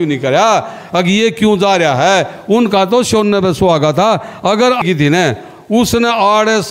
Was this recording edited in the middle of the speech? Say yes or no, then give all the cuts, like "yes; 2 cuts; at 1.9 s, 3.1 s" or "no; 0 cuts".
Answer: yes; 1 cut; at 4.8 s